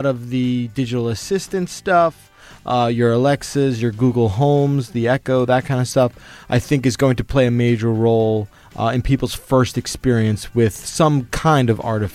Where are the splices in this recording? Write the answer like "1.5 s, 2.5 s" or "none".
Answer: none